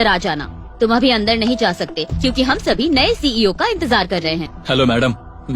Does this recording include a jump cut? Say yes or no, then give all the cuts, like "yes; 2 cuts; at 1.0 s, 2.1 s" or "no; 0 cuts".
yes; 1 cut; at 4.5 s